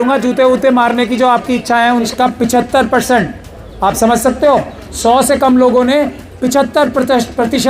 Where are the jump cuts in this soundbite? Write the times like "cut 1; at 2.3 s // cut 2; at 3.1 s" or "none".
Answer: cut 1; at 2.1 s